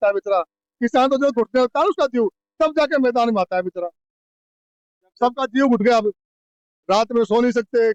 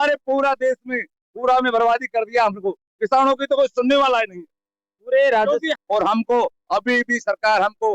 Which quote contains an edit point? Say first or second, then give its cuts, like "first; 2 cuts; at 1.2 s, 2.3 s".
second; 1 cut; at 5.8 s